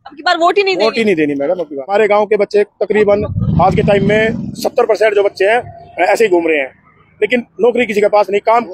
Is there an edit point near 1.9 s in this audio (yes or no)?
yes